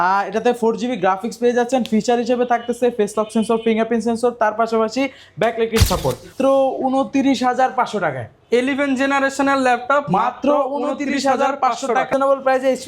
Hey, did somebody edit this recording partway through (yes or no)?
yes